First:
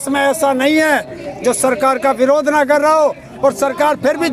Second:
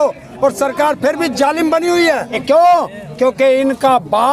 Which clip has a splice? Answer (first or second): second